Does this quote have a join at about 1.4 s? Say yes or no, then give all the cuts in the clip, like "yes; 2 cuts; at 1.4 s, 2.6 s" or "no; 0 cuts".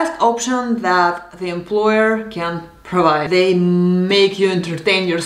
no; 1 cut; at 3.2 s